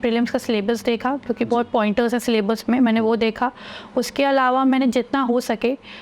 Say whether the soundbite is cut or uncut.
uncut